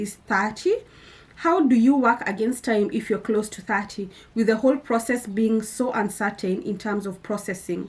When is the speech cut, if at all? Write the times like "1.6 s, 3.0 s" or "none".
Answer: none

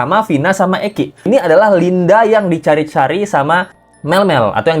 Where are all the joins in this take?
1.2 s

